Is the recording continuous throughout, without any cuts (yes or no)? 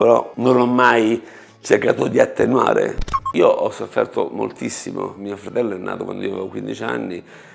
no